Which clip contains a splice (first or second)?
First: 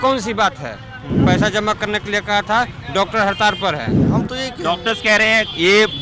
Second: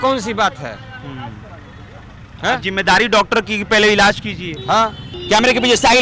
first